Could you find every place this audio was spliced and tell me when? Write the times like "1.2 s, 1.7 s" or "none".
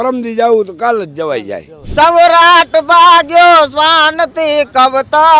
1.8 s